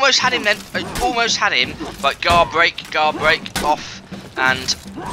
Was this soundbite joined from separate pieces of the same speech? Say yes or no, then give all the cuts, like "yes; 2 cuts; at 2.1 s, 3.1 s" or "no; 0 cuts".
no; 0 cuts